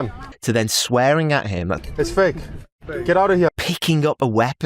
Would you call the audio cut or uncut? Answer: cut